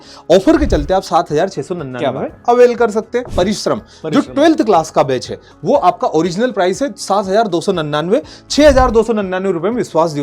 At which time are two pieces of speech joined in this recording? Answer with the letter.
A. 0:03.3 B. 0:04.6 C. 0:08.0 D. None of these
A